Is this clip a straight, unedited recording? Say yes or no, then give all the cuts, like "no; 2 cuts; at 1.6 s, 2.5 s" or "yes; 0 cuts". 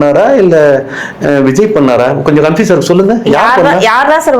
yes; 0 cuts